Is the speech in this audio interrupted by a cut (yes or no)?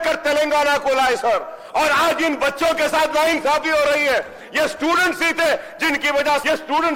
no